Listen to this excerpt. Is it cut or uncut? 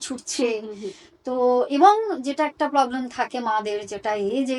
uncut